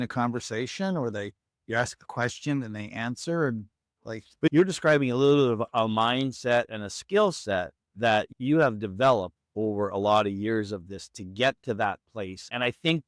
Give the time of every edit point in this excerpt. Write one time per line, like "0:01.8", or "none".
0:04.5